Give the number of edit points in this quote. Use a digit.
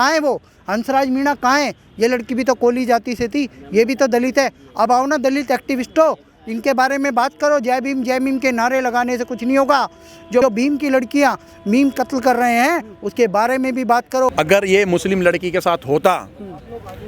2